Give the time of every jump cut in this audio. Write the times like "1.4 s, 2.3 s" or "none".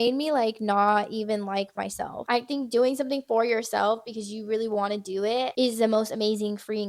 2.2 s, 5.5 s